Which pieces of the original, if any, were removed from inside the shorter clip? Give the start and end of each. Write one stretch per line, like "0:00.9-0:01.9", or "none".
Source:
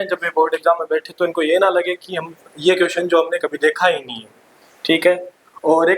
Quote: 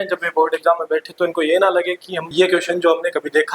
0:02.1-0:02.4